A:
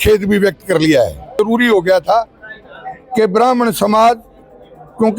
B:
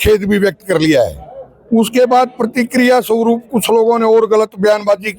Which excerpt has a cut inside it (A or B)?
A